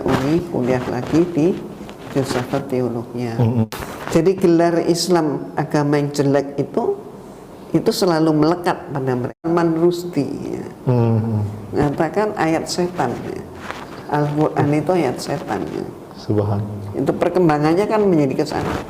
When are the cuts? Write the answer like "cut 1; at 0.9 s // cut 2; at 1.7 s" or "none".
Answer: cut 1; at 3.6 s // cut 2; at 9.5 s